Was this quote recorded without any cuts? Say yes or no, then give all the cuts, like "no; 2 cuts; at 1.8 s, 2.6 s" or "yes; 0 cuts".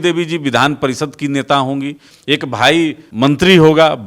no; 1 cut; at 2.1 s